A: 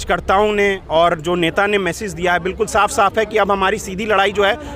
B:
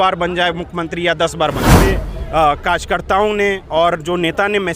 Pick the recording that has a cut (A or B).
B